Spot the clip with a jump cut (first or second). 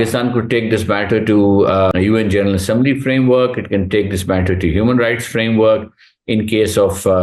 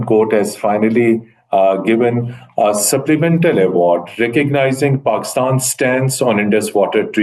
first